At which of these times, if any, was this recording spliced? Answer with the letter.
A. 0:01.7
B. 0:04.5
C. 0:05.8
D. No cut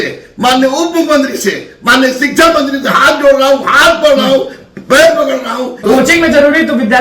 C